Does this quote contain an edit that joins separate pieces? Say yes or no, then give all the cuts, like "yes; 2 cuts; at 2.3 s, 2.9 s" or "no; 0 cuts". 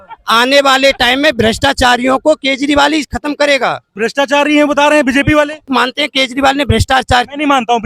yes; 2 cuts; at 3.9 s, 5.7 s